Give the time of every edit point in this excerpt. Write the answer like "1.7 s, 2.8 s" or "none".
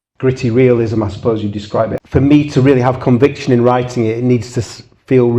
2.0 s

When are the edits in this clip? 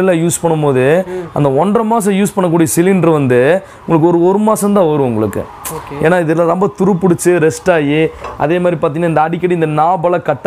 none

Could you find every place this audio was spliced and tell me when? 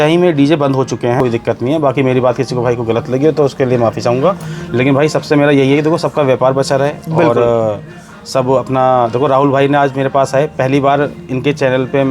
1.2 s

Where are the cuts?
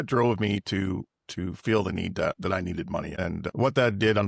3.2 s

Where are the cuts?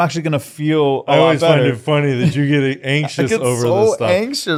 none

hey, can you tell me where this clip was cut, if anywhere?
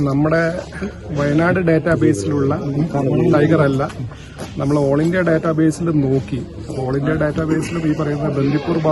none

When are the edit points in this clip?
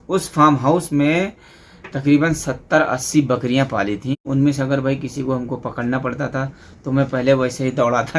4.2 s

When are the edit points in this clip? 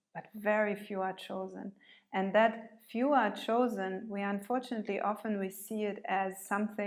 none

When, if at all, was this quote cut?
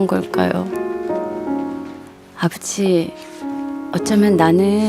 1.7 s

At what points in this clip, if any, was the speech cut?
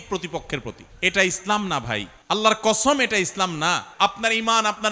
0.9 s, 2.1 s, 3.9 s

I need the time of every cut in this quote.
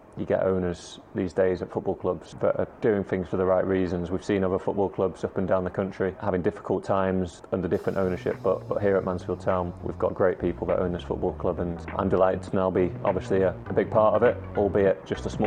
2.3 s, 6.2 s, 7.4 s, 9.8 s, 11.8 s, 13.6 s

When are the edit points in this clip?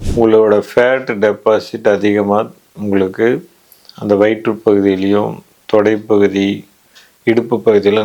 none

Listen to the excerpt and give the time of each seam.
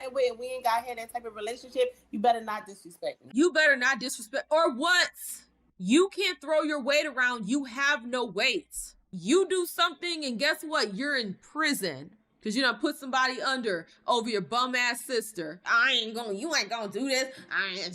3.2 s, 9.1 s, 15.6 s

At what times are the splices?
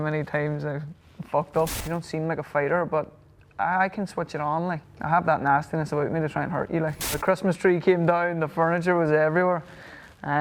1.8 s, 4.8 s, 7.2 s

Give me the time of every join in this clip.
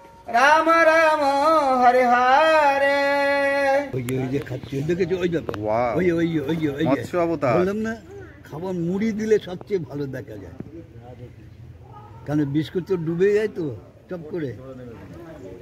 4.0 s

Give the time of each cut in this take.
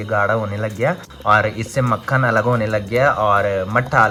none

